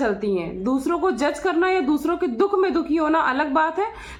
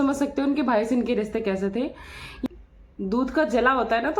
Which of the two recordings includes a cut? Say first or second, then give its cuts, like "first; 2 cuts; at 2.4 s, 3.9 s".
second; 1 cut; at 2.4 s